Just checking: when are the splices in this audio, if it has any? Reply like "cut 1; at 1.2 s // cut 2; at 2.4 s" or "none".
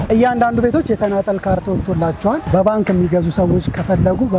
none